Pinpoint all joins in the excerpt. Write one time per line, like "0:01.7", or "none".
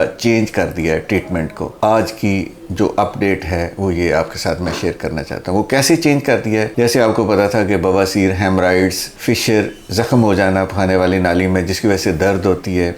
none

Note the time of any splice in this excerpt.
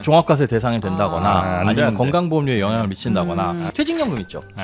0:03.7

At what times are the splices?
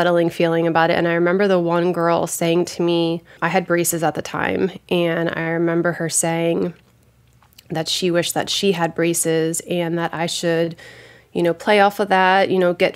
none

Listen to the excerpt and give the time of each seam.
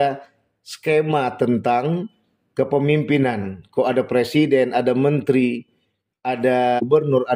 none

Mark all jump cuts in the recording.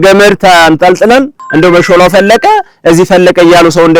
0:01.4

